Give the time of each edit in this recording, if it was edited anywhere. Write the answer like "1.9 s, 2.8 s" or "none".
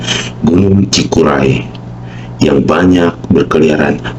none